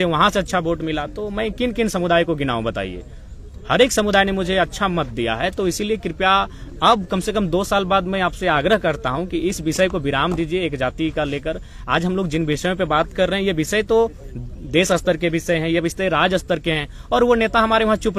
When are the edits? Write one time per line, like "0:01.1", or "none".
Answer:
none